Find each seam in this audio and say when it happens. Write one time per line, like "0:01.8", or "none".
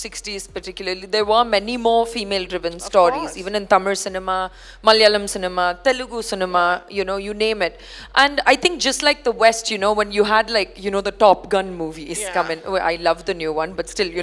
none